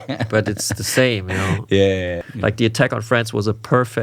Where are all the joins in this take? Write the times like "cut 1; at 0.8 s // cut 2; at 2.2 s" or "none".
cut 1; at 2.2 s